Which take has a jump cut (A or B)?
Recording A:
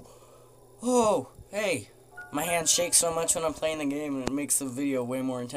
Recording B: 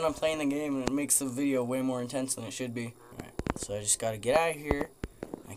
B